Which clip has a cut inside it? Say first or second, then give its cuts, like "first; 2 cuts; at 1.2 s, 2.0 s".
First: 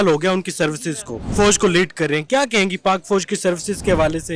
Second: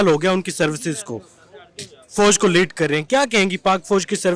first; 1 cut; at 1.1 s